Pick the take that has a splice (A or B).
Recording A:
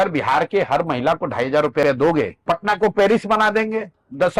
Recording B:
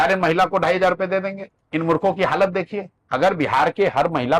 A